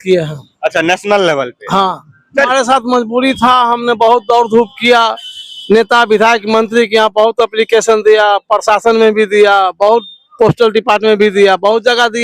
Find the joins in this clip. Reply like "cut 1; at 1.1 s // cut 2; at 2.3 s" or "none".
cut 1; at 2.5 s

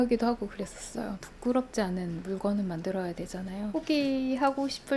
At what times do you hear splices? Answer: cut 1; at 3.7 s

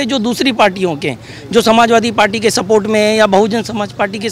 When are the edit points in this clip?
none

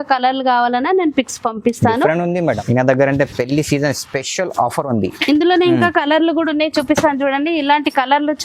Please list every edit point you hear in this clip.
cut 1; at 2.4 s

